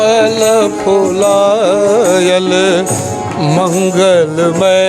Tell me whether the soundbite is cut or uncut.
uncut